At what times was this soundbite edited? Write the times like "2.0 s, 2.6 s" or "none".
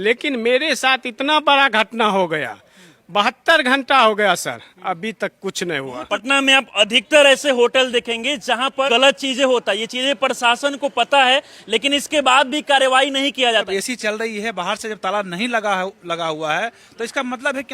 6.1 s, 8.9 s, 13.7 s

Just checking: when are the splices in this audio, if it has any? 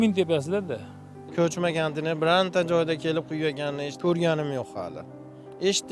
1.3 s, 3.9 s

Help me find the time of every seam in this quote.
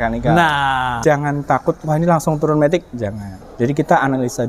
1.0 s

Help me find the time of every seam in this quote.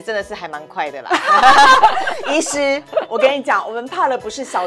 none

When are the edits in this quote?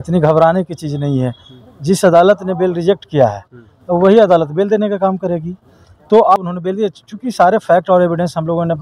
6.4 s

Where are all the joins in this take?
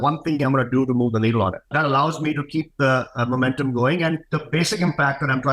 1.7 s, 4.3 s

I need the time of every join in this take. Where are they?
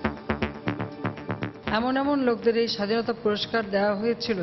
1.6 s

